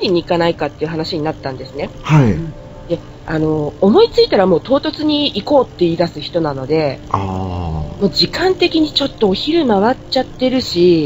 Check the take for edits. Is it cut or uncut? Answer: uncut